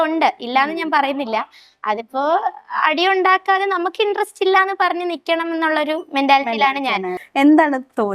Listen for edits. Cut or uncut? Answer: cut